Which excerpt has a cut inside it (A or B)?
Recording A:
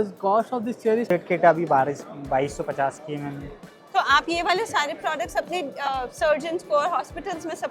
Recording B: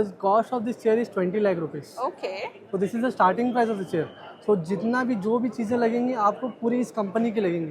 A